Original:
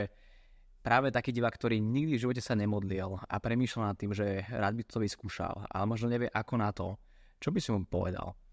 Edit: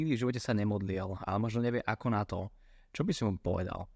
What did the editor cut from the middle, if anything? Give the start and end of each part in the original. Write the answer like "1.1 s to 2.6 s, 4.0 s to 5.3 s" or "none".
3.2 s to 5.6 s